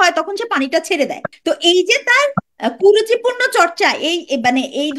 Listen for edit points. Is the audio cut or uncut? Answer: cut